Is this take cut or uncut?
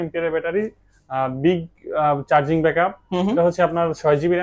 uncut